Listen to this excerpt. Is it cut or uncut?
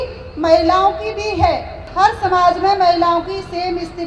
cut